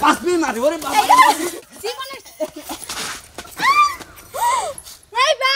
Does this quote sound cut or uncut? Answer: uncut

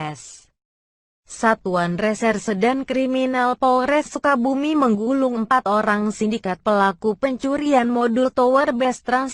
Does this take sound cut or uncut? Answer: cut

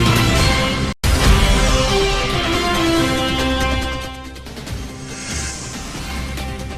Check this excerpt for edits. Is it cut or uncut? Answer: cut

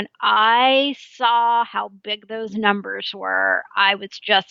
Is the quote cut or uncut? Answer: uncut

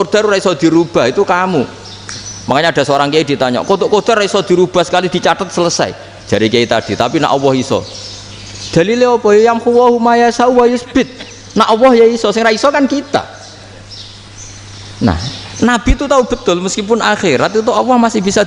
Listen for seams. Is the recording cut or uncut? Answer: uncut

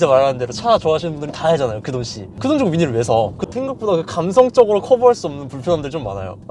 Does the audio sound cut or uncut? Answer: cut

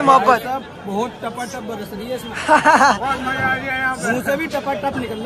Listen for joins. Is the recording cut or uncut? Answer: uncut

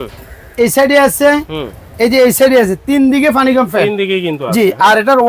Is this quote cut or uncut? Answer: uncut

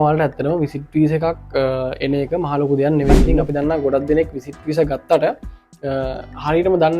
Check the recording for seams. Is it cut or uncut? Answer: cut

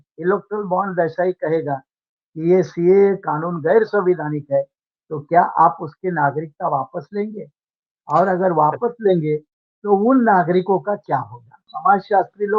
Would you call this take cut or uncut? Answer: cut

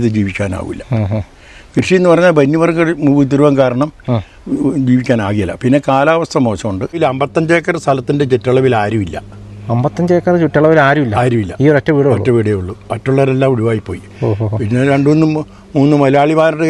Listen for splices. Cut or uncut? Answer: cut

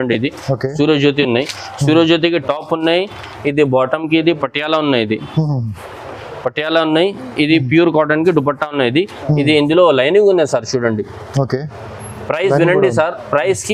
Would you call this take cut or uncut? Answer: uncut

